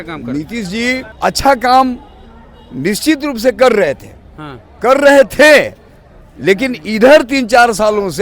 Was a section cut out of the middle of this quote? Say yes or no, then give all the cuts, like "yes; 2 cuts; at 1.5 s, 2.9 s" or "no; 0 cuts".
yes; 1 cut; at 1.1 s